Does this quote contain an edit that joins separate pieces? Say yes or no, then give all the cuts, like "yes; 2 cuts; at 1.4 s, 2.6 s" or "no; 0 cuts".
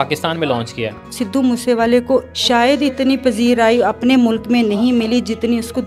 yes; 2 cuts; at 1.1 s, 2.3 s